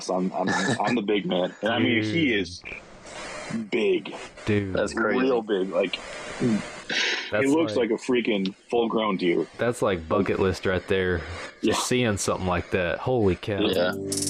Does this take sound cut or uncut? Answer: uncut